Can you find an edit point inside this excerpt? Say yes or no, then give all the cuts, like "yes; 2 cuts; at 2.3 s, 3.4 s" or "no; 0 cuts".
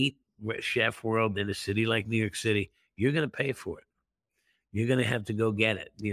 no; 0 cuts